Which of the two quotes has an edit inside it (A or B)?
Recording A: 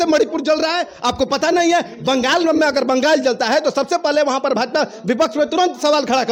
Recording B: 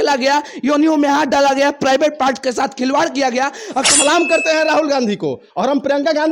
B